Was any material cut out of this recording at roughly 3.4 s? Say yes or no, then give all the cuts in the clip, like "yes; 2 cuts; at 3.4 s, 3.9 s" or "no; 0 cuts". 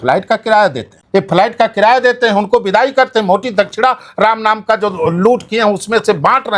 no; 1 cut; at 0.9 s